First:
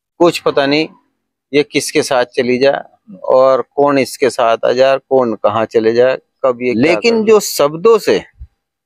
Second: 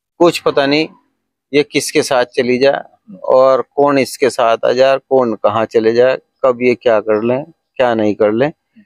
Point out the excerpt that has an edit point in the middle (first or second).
first